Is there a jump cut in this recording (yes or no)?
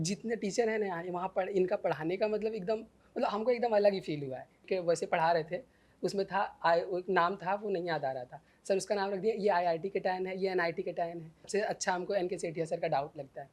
yes